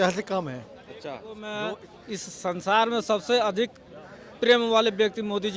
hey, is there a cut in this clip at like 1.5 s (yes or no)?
yes